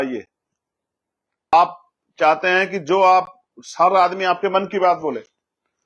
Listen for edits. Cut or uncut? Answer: cut